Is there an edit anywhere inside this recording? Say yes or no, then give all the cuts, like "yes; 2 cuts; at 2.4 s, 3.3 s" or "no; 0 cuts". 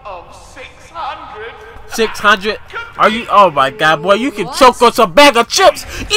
no; 0 cuts